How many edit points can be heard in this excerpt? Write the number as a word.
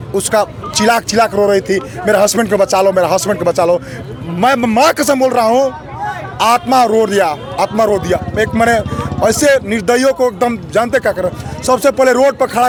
zero